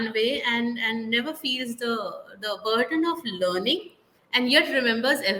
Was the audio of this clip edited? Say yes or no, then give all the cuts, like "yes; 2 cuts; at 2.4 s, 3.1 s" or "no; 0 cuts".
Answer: no; 0 cuts